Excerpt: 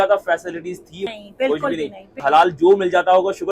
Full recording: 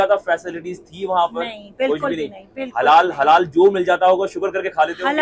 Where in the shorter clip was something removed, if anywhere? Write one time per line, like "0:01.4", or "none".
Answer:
0:01.1
0:02.2